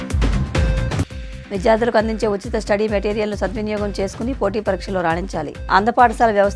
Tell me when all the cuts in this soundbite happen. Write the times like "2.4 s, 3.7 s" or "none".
1.0 s